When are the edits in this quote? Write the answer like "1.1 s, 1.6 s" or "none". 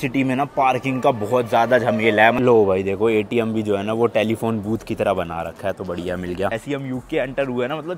2.4 s, 6.5 s